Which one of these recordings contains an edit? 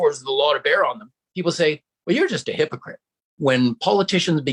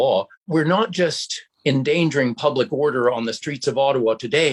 first; 1 cut; at 3.3 s

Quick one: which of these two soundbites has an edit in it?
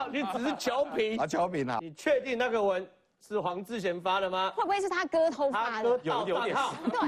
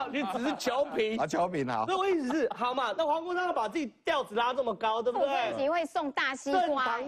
first; 1 cut; at 1.8 s

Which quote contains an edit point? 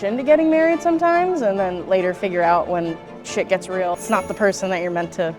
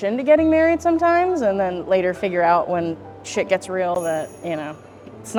first; 1 cut; at 3.9 s

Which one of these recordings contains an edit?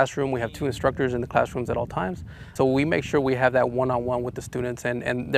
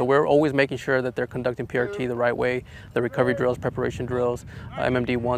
first; 1 cut; at 2.5 s

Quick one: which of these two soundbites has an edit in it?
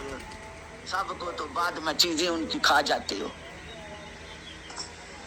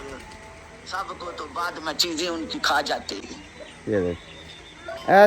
second; 1 cut; at 3.2 s

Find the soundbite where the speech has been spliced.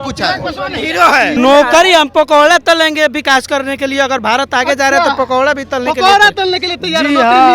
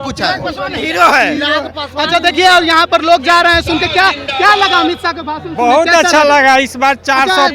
first; 1 cut; at 1.4 s

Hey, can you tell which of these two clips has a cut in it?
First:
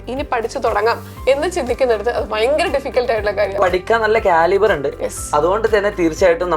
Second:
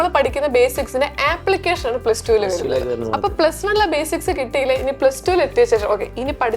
first; 1 cut; at 3.6 s

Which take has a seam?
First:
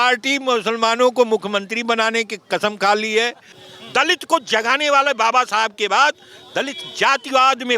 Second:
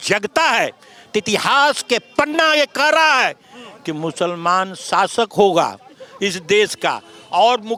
first; 1 cut; at 3.5 s

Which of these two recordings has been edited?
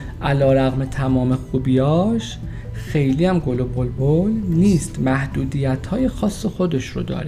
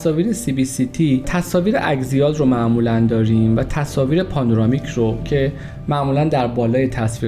second; 1 cut; at 1.3 s

